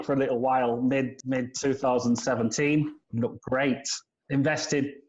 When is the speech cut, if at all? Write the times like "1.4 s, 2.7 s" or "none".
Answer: 1.1 s